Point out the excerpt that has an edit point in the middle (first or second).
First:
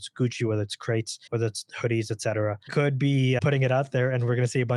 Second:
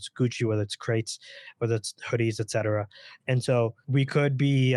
first